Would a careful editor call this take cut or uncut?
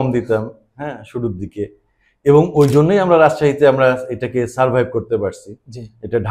uncut